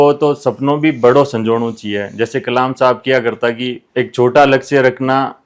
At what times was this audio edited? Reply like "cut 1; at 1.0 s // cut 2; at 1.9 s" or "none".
none